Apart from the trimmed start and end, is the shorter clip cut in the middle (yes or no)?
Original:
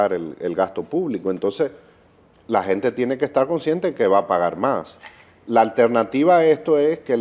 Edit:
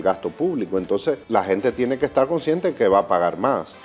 yes